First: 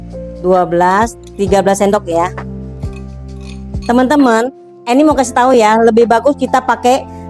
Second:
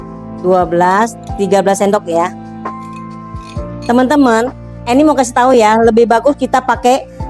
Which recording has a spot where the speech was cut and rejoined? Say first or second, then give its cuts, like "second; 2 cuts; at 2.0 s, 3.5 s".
second; 2 cuts; at 2.3 s, 3.9 s